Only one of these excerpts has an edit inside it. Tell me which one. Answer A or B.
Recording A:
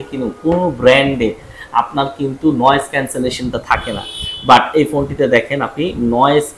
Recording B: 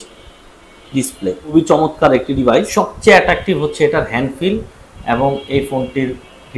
B